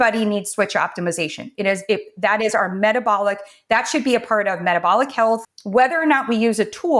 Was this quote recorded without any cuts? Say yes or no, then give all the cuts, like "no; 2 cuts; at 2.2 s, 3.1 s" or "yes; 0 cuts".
yes; 0 cuts